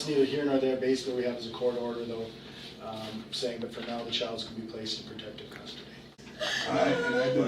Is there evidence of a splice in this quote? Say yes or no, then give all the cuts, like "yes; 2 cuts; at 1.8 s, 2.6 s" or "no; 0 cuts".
yes; 1 cut; at 6.1 s